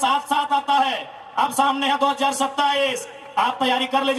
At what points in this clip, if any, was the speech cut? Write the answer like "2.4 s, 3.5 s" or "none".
none